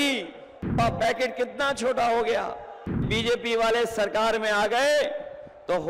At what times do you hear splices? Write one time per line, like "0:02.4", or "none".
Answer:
0:00.8
0:03.1